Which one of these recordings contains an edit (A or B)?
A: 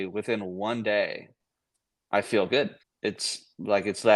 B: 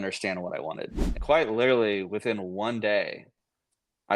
B